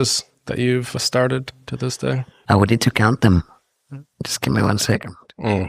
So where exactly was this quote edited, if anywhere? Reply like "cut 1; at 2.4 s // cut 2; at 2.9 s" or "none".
cut 1; at 1.0 s // cut 2; at 2.3 s // cut 3; at 4.0 s